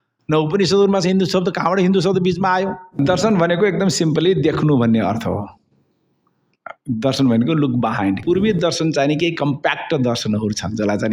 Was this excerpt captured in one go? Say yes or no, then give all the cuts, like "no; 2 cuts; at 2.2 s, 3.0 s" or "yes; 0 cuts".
no; 2 cuts; at 3.0 s, 8.2 s